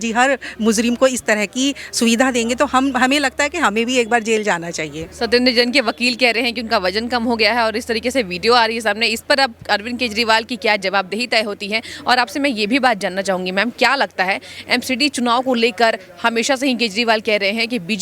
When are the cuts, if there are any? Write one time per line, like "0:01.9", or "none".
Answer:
none